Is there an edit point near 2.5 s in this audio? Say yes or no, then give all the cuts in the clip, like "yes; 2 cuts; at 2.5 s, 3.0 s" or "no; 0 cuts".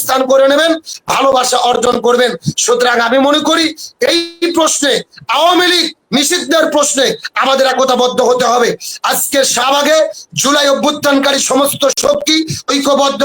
no; 0 cuts